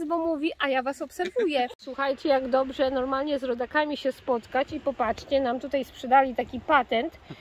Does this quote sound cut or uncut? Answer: cut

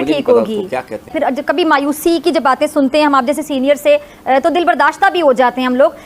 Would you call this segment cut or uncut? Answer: cut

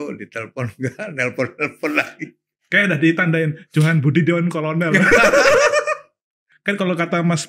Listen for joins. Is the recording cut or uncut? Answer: cut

